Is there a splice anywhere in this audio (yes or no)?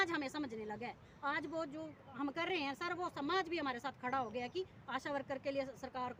no